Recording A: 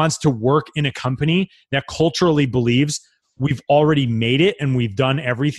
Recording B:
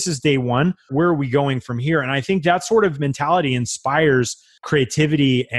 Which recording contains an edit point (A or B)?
B